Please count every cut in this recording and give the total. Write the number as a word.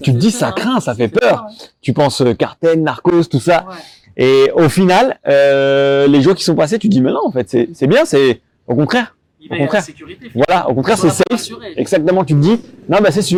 zero